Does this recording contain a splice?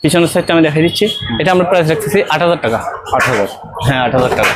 no; 0 cuts

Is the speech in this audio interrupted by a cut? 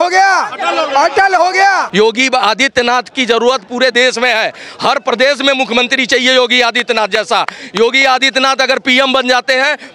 yes; 1 cut; at 1.9 s

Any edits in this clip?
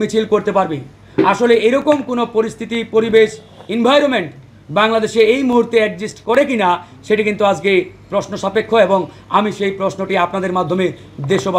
no; 0 cuts

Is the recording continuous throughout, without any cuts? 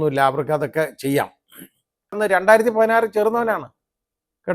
no; 1 cut; at 2.2 s

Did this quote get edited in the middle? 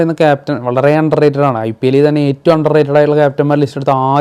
no; 0 cuts

